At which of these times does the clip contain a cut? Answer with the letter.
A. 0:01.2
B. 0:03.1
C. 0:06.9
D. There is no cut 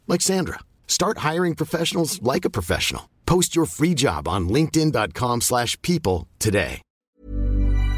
C